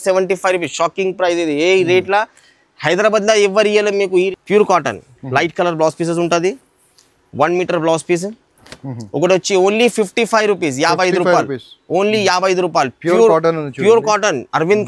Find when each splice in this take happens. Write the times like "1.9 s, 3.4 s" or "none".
4.3 s